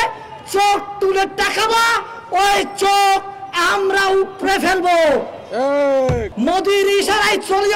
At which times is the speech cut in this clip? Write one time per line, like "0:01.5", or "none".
0:06.3

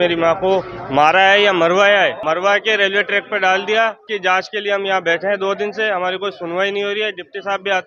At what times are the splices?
0:02.2
0:04.0

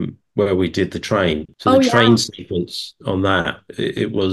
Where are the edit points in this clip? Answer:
0:01.5

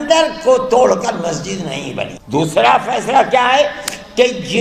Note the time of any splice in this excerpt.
0:02.1

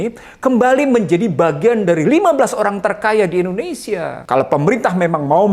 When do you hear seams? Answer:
0:04.1

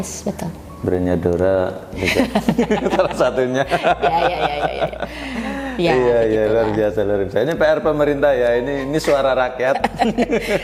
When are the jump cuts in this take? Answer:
none

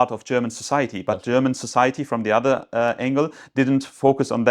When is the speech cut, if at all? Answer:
none

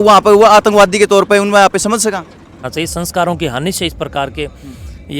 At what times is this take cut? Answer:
0:02.7

